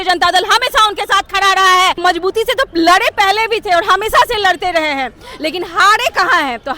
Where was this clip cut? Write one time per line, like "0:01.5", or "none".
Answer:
0:02.0